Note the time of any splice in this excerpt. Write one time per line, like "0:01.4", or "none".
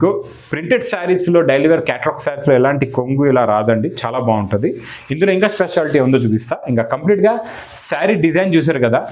none